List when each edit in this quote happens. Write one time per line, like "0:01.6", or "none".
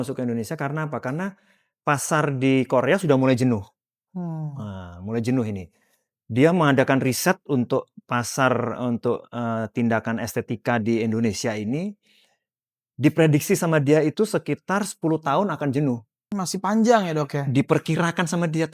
0:16.3